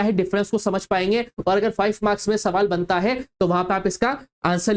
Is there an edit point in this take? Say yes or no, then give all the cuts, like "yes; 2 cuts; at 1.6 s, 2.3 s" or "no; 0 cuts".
no; 0 cuts